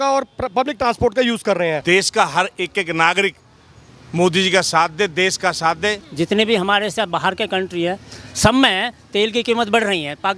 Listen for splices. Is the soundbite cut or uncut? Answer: cut